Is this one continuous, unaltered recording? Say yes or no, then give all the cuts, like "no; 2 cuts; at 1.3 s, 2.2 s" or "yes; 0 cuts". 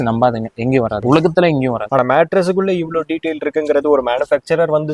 no; 2 cuts; at 1.0 s, 1.8 s